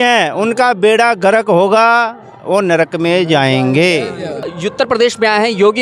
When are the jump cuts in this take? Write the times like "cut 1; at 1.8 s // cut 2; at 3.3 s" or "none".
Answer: cut 1; at 4.5 s